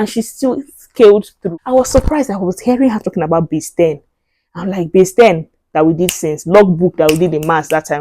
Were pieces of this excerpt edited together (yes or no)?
yes